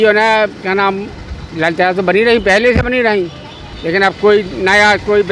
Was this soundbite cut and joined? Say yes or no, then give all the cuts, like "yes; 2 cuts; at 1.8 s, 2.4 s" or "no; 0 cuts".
no; 0 cuts